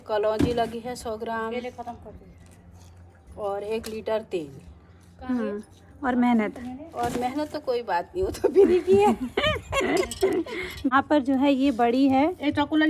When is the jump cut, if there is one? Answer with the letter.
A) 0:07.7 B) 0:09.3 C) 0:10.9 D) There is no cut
C